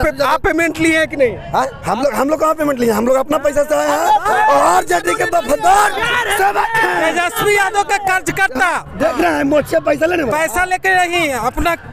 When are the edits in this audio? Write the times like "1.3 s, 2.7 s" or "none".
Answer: none